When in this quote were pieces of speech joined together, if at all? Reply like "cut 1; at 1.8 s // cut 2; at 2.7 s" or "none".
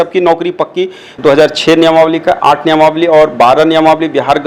cut 1; at 1.1 s